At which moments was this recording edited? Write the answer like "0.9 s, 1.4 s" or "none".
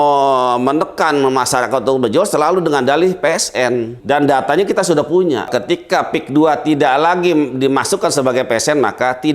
4.0 s, 5.5 s

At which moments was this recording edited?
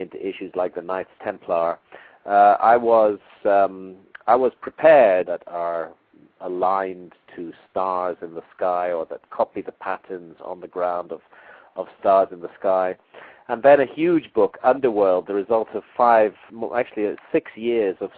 none

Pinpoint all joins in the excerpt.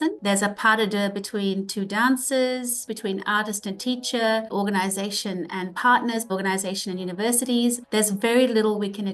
2.9 s, 4.5 s, 6.3 s, 7.8 s

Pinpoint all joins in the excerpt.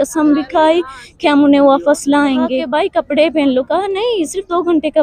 2.6 s

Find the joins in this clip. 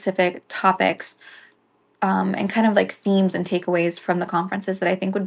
none

